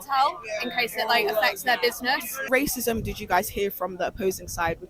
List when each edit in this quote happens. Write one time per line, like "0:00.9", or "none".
0:02.4